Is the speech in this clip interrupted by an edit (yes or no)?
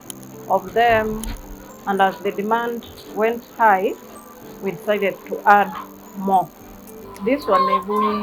yes